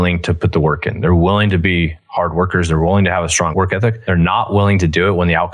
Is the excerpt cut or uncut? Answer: cut